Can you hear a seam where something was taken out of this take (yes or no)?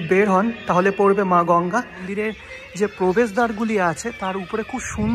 yes